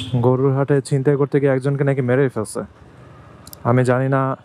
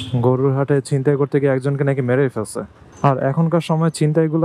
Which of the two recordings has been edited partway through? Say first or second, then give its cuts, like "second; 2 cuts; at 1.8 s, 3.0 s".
second; 1 cut; at 2.8 s